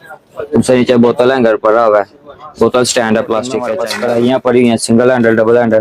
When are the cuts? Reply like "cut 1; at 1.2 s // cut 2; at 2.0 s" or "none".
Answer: cut 1; at 3.8 s